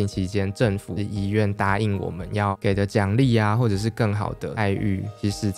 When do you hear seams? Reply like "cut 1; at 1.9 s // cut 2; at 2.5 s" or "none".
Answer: cut 1; at 1.0 s // cut 2; at 4.7 s